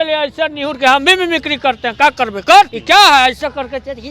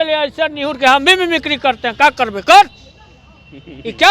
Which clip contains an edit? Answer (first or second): first